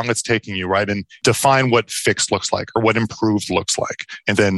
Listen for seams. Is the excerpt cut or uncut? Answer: cut